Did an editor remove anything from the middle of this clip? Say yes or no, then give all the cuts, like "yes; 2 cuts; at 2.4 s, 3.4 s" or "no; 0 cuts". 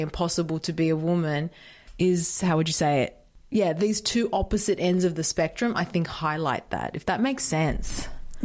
no; 0 cuts